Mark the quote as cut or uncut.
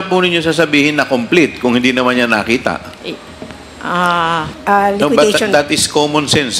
cut